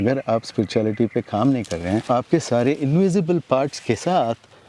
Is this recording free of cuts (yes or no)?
no